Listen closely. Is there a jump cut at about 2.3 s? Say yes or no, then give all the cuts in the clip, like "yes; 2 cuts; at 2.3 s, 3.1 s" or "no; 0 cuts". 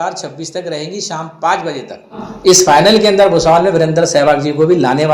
yes; 1 cut; at 2.3 s